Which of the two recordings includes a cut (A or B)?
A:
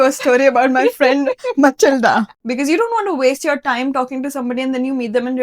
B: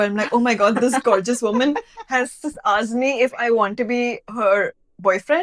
A